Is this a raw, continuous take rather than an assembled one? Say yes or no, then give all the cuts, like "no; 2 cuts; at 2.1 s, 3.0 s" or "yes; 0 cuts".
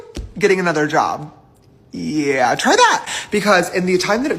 yes; 0 cuts